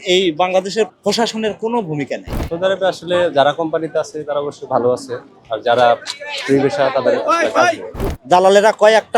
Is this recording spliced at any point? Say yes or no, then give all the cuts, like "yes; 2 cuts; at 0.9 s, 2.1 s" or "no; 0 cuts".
yes; 3 cuts; at 0.9 s, 2.4 s, 8.0 s